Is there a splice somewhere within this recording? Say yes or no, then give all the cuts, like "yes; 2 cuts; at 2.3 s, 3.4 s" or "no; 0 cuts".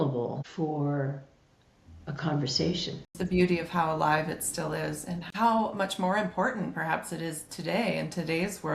yes; 2 cuts; at 3.1 s, 5.2 s